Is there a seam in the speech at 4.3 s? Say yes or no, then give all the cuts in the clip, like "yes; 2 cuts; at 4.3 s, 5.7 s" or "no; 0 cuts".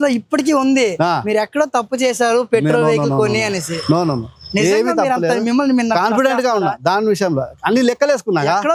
no; 0 cuts